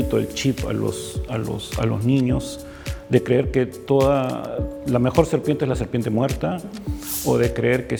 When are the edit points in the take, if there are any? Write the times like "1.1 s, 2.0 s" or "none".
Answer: none